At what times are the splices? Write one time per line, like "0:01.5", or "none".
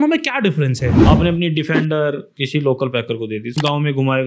0:00.9
0:02.3
0:03.5